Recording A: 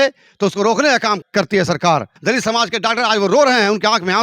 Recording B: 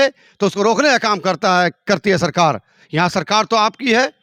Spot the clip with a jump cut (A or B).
A